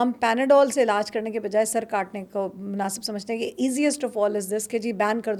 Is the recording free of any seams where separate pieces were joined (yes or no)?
yes